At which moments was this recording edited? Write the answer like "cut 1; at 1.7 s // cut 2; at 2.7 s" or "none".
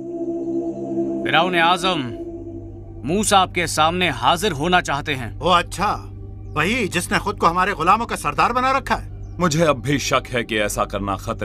cut 1; at 10.2 s